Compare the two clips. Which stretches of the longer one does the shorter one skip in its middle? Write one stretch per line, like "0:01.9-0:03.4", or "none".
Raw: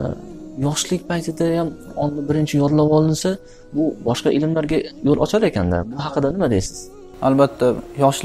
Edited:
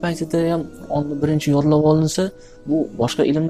none